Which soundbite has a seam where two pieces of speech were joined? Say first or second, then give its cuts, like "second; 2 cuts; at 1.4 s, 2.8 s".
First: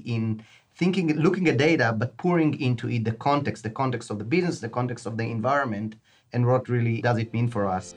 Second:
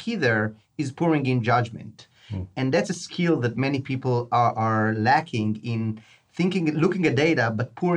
first; 1 cut; at 7.0 s